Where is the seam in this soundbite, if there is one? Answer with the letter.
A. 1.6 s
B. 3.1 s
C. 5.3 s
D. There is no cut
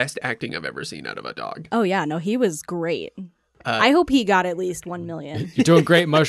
A